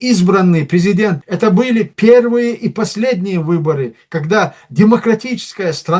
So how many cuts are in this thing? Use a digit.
1